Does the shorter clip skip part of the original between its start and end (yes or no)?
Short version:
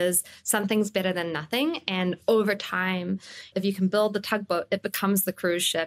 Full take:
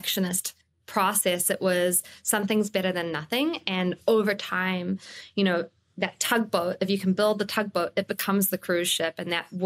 yes